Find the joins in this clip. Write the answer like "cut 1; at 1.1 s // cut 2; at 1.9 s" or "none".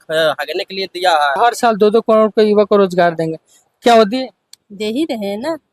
cut 1; at 1.4 s